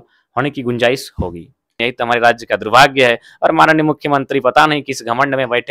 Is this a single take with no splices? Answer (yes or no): no